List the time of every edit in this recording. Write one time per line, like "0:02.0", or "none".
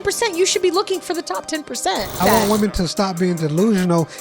0:02.2